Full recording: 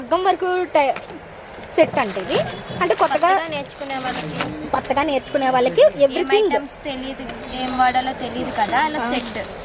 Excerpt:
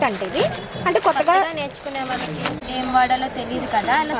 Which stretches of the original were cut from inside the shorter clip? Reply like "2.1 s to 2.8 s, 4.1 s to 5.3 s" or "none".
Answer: 4.5 s to 7.4 s